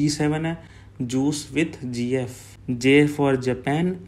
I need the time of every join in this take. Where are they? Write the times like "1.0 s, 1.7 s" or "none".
none